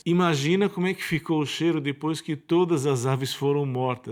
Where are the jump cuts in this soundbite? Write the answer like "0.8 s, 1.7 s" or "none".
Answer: none